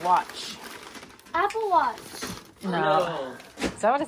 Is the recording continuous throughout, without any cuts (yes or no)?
yes